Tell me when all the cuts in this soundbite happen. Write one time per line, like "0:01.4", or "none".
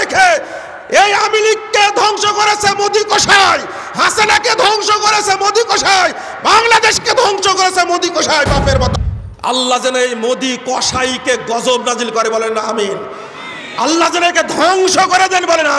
0:08.9